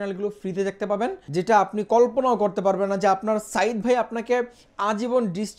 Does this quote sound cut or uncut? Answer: cut